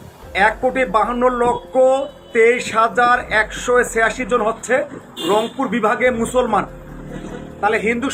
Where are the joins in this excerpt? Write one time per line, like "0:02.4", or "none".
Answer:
none